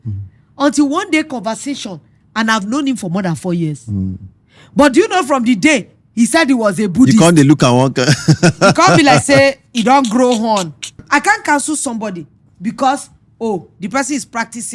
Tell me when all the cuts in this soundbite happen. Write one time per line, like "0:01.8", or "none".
0:11.0